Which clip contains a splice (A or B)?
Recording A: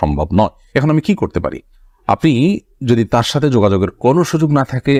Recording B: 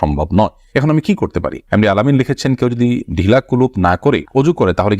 B